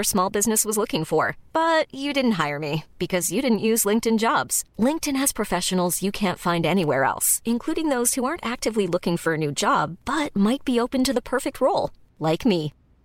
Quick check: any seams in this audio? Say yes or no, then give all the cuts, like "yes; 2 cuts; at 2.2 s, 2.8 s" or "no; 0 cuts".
no; 0 cuts